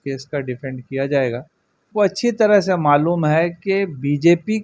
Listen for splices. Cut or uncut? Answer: cut